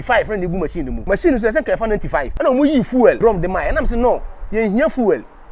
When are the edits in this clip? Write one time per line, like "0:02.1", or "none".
0:00.9
0:02.3
0:03.2